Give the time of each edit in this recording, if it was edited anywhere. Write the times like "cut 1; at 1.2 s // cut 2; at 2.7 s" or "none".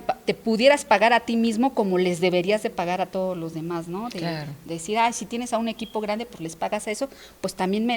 none